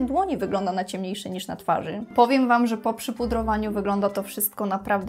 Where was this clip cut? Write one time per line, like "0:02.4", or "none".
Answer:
0:02.1